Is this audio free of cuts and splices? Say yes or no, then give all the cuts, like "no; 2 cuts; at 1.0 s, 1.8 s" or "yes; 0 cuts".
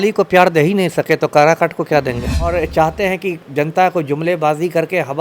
no; 1 cut; at 2.5 s